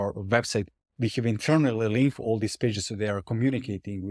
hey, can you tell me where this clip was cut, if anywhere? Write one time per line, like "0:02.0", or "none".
none